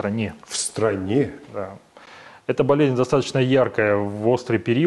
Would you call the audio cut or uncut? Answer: uncut